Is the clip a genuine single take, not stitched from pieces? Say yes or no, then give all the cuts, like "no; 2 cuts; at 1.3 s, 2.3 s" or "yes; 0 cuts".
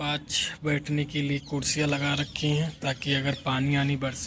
yes; 0 cuts